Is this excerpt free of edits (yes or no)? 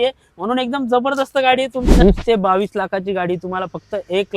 no